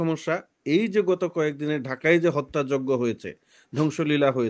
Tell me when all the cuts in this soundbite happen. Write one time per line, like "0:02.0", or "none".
none